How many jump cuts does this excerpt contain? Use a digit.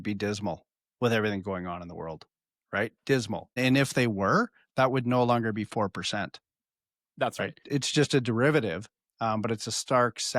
2